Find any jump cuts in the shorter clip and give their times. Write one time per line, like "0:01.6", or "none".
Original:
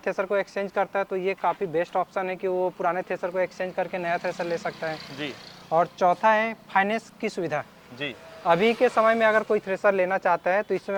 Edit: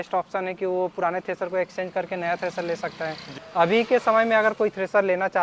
0:03.3